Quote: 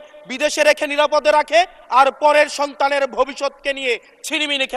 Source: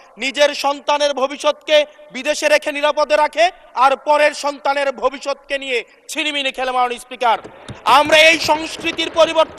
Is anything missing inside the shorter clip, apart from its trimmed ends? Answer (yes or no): no